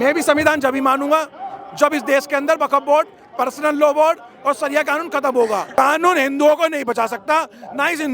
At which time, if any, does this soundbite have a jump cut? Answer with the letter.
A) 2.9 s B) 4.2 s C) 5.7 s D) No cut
C